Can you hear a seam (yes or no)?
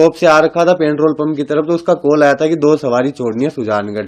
no